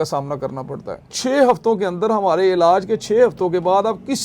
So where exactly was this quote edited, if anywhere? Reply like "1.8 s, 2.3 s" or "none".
1.1 s